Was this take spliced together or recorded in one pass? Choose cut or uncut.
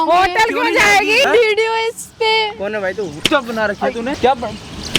cut